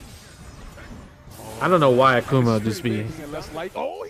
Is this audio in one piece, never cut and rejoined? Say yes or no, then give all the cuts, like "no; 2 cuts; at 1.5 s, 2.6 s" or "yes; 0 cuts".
no; 1 cut; at 3.2 s